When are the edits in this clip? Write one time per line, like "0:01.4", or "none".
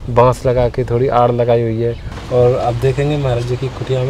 0:02.1